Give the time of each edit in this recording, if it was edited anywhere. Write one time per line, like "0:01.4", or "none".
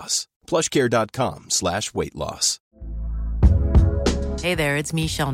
0:02.6